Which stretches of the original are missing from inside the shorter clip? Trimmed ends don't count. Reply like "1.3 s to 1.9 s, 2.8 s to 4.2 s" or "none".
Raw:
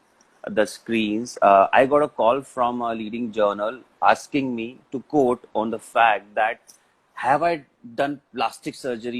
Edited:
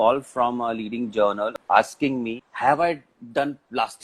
3.8 s to 3.9 s, 4.7 s to 7.0 s